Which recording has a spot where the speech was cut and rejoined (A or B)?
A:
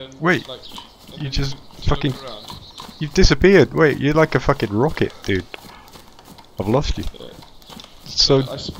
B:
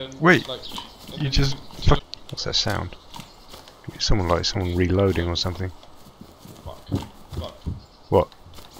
B